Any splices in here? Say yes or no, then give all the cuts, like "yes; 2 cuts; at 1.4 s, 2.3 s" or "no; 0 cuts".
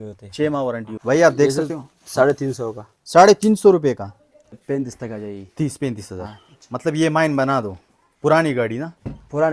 yes; 2 cuts; at 0.9 s, 4.5 s